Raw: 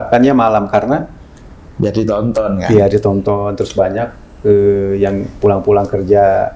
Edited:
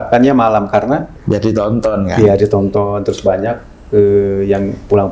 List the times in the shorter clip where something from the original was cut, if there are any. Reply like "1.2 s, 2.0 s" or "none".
1.1 s